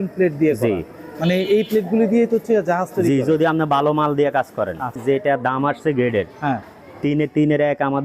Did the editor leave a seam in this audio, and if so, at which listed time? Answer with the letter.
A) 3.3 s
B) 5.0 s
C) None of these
B